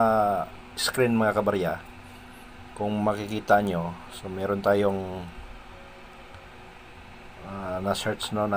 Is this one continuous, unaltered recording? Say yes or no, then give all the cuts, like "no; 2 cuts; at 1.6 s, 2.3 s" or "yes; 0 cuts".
yes; 0 cuts